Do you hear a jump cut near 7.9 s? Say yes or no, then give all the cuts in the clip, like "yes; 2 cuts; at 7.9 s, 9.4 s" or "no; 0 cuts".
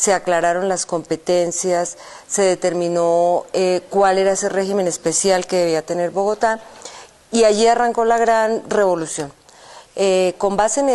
yes; 1 cut; at 7.9 s